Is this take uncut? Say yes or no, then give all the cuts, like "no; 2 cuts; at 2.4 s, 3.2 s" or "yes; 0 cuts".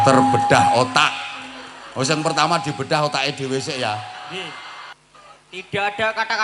no; 1 cut; at 4.9 s